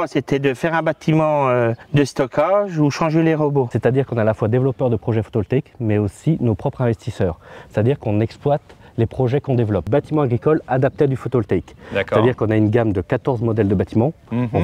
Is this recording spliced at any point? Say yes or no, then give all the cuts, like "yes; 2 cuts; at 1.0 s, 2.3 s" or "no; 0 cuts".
yes; 3 cuts; at 1.8 s, 3.7 s, 9.9 s